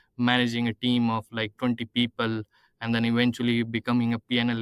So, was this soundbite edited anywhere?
no; 0 cuts

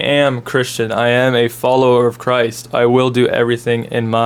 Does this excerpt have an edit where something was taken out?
no; 0 cuts

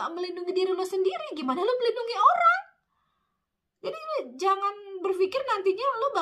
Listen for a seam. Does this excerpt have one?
no; 0 cuts

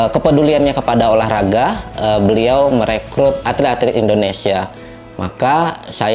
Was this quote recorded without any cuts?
no; 1 cut; at 3.4 s

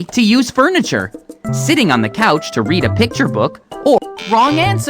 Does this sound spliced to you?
yes; 1 cut; at 4.0 s

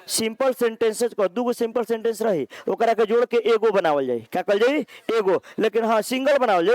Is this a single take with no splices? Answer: yes; 0 cuts

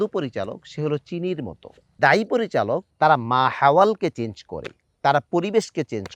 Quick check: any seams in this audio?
yes; 2 cuts; at 1.9 s, 2.9 s

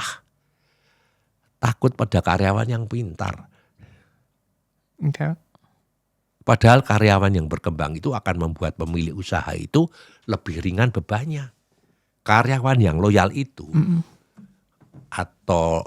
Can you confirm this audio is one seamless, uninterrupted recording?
no; 1 cut; at 12.1 s

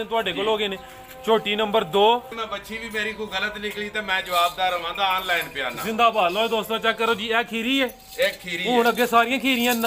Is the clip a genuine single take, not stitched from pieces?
no; 1 cut; at 2.4 s

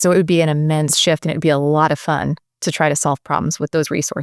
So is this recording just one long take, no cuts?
yes; 0 cuts

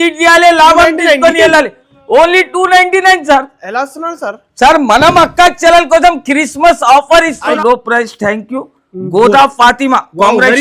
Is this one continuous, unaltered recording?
no; 1 cut; at 7.6 s

